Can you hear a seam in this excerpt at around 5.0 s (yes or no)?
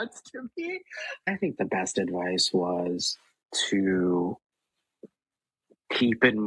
no